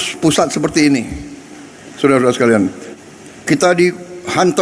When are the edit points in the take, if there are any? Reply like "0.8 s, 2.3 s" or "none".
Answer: 2.9 s

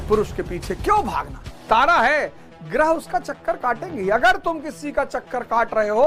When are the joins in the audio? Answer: 1.5 s

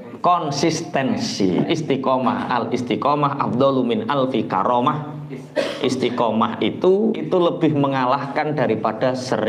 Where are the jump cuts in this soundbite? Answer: 1.7 s, 7.2 s

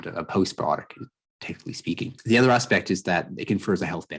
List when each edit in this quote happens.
2.1 s

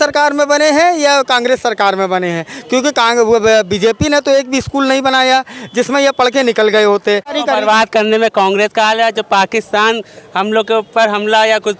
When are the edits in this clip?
7.4 s

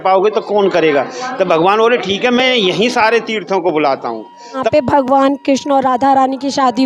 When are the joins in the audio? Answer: 4.7 s

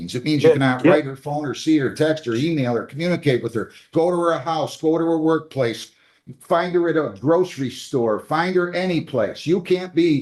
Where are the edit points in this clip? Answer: none

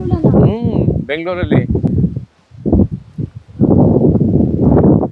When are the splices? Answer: none

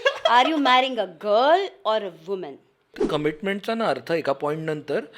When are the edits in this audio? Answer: 3.0 s

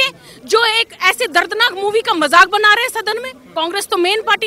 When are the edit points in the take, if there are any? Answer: 3.4 s

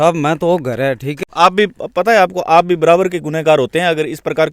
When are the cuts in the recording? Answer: 1.2 s

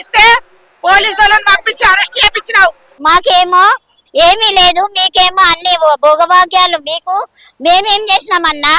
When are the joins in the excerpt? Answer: 3.0 s

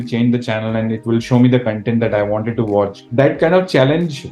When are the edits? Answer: 3.0 s

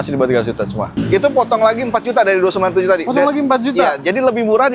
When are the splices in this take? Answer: 1.0 s

